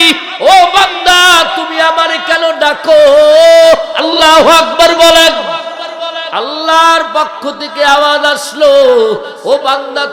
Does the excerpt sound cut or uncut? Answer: uncut